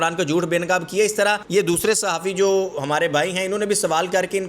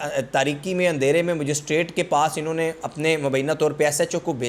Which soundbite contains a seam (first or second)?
first